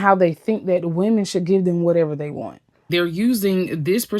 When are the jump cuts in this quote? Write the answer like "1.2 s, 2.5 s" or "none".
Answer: 2.8 s